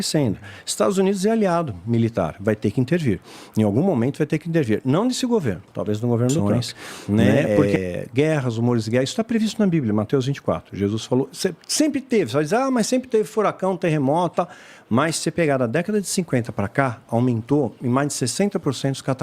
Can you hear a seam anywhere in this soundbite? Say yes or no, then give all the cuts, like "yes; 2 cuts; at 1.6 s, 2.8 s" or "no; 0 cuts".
yes; 1 cut; at 6.4 s